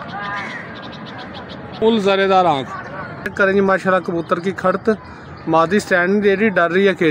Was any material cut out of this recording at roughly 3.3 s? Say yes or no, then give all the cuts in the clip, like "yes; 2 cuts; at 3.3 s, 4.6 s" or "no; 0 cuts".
yes; 1 cut; at 3.3 s